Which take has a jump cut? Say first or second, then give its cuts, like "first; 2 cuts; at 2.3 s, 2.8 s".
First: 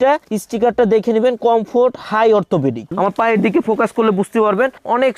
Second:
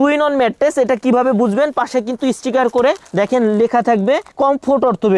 first; 1 cut; at 2.9 s